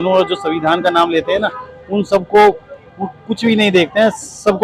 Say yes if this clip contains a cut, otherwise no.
no